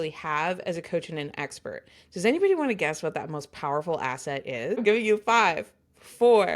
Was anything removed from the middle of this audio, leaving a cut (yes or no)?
yes